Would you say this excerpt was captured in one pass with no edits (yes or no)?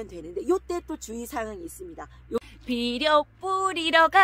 no